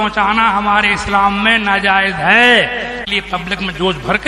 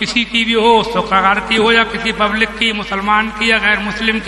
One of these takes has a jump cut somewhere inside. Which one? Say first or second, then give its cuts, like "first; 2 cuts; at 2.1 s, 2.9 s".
first; 1 cut; at 3.0 s